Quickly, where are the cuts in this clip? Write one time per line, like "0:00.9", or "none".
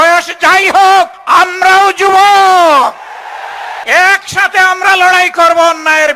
0:01.2
0:03.8